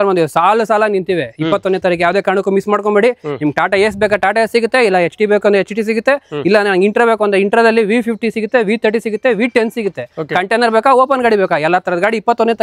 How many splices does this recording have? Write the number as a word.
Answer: zero